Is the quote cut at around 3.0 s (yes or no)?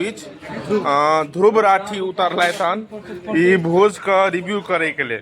no